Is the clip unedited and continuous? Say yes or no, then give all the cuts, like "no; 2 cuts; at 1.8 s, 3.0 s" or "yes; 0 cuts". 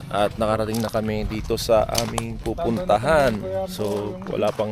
no; 1 cut; at 3.7 s